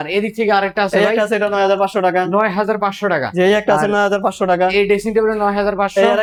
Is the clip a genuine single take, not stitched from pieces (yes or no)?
yes